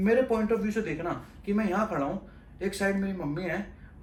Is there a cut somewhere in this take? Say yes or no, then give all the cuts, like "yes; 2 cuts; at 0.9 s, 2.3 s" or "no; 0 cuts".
no; 0 cuts